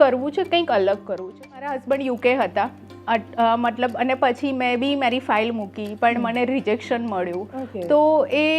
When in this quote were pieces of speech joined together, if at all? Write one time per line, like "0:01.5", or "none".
0:01.7